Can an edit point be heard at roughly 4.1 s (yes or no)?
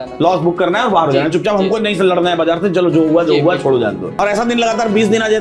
yes